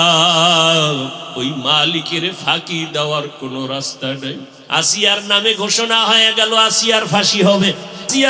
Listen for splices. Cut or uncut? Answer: cut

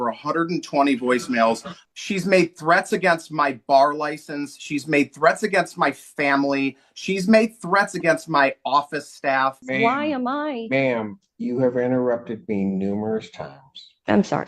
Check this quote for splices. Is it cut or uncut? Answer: cut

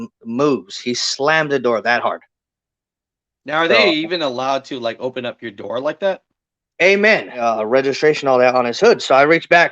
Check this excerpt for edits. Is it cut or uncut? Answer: cut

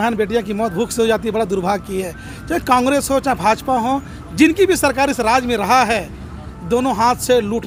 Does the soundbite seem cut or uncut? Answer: uncut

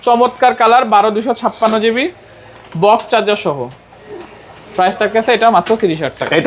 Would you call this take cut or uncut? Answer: uncut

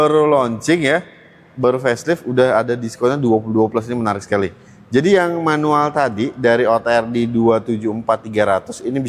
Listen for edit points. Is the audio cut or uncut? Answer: uncut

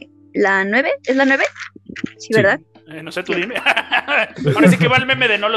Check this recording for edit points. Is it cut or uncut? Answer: uncut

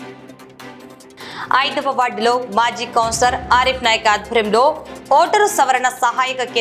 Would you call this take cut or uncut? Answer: cut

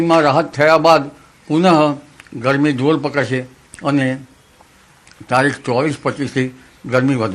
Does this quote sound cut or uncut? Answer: uncut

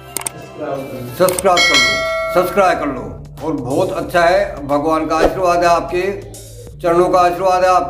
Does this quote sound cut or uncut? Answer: cut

